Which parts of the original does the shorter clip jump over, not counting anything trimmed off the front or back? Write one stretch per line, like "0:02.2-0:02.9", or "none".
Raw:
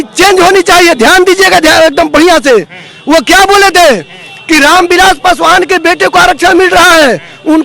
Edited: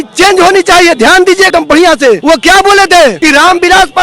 0:01.8-0:02.6
0:04.0-0:04.4